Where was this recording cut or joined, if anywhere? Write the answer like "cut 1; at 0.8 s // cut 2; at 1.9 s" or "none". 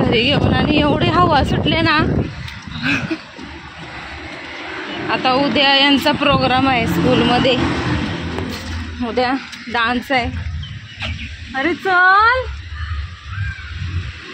none